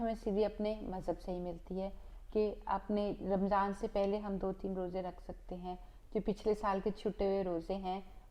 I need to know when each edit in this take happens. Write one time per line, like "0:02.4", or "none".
none